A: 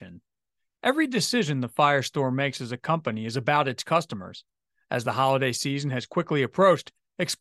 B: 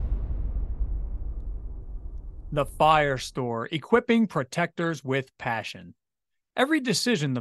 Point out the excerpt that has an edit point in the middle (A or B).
B